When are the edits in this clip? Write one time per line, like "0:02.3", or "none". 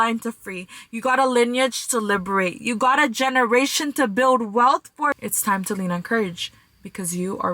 0:05.2